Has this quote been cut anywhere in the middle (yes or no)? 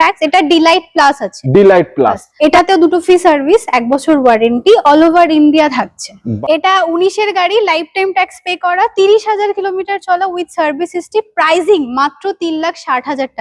yes